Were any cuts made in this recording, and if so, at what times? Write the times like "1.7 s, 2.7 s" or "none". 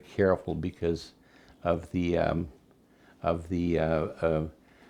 none